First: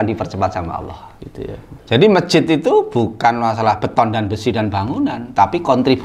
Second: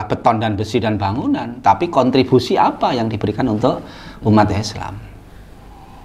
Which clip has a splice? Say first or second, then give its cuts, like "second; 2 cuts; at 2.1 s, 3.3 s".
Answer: first; 1 cut; at 1.7 s